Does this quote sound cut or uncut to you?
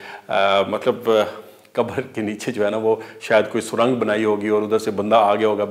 uncut